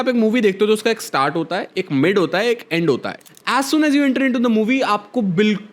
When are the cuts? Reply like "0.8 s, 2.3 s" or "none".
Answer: 3.1 s